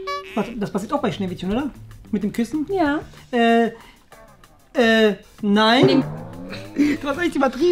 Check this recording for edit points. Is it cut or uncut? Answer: cut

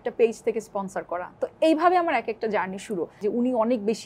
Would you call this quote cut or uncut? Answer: cut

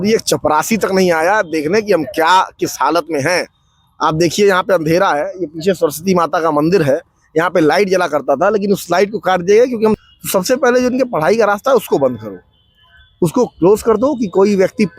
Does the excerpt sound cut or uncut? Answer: cut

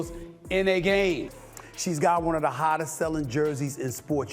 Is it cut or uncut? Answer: cut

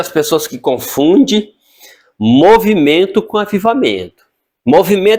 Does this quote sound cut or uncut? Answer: uncut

